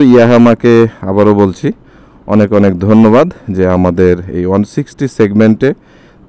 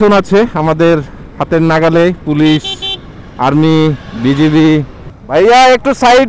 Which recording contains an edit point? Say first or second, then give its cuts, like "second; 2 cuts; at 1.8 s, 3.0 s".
second; 1 cut; at 5.1 s